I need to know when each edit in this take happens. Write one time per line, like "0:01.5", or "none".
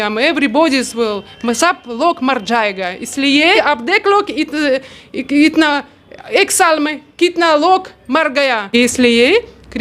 0:03.6
0:08.7

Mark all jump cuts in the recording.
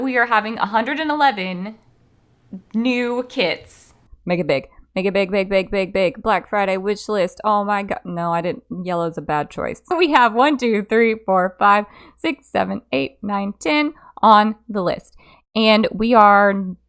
0:04.1
0:09.9

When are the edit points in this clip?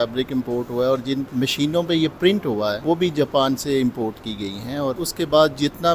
0:01.3
0:02.8
0:05.1

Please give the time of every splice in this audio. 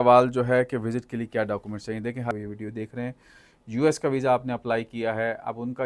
0:02.3

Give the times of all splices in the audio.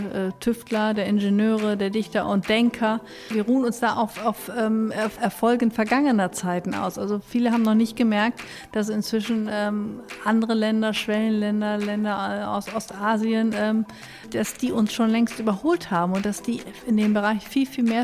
0:03.2
0:05.1
0:14.3

